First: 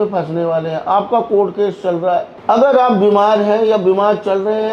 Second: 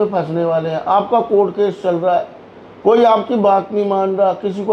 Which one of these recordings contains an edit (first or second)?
first